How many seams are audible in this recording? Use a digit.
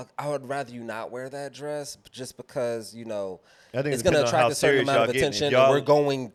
0